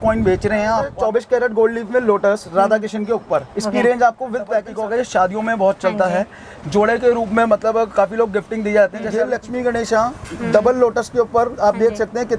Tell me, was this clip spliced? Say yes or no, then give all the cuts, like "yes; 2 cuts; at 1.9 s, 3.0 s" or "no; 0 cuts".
yes; 3 cuts; at 0.9 s, 4.7 s, 9.2 s